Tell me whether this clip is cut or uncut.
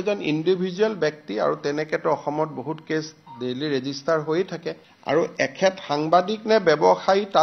uncut